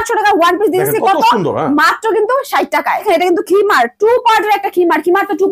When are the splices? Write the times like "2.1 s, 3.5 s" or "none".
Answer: 3.0 s